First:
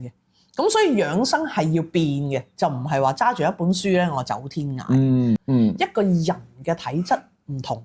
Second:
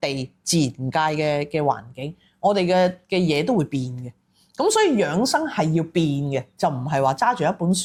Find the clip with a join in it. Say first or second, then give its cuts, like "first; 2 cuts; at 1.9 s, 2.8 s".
first; 1 cut; at 5.4 s